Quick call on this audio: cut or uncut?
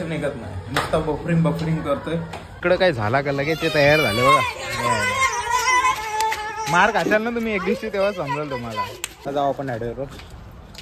cut